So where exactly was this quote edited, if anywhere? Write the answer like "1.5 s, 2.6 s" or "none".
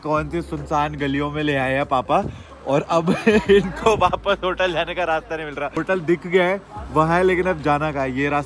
none